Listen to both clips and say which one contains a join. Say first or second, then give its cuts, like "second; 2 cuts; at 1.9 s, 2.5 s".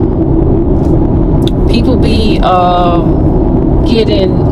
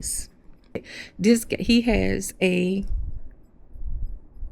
second; 1 cut; at 1.0 s